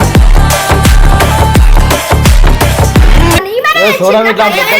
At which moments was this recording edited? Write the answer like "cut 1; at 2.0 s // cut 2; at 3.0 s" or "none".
cut 1; at 3.4 s